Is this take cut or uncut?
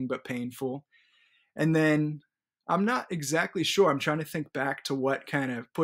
uncut